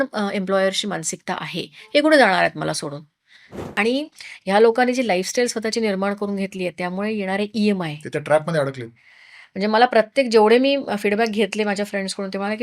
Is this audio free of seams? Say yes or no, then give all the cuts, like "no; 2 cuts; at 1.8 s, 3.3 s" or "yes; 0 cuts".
no; 1 cut; at 3.7 s